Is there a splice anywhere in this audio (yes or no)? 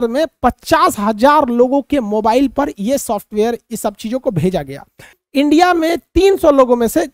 yes